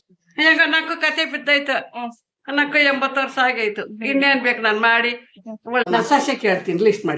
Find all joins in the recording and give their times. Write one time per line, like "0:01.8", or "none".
0:05.8